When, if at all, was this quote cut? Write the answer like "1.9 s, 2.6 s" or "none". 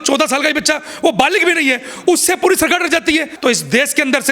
3.3 s